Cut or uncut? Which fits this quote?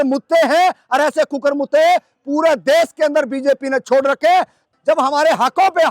cut